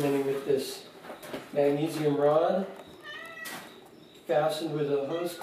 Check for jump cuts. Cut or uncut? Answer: uncut